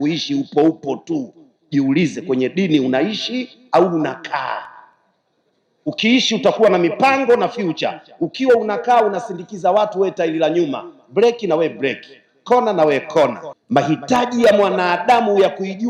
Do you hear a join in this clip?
yes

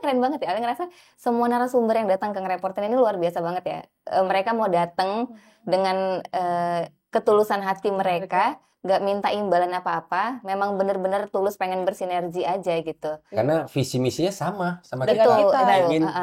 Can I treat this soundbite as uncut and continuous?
yes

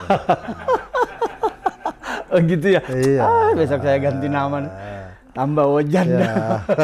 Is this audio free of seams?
yes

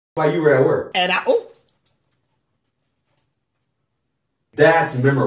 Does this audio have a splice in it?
no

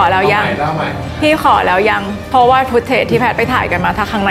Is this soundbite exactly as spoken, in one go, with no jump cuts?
no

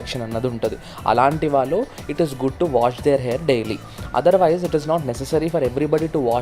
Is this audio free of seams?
yes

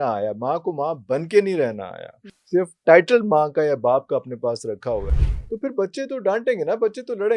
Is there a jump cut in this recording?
no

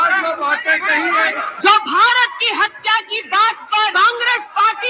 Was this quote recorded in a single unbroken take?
no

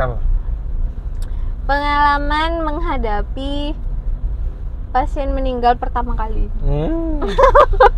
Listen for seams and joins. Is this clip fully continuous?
yes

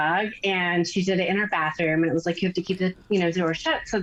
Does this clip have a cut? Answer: no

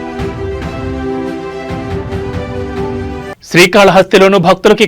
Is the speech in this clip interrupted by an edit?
yes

